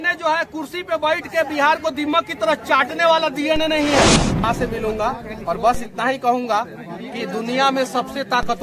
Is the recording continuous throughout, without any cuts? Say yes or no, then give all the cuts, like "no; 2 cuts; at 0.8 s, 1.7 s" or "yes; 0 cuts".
no; 1 cut; at 4.4 s